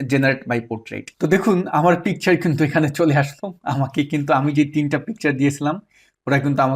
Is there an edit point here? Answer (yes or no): no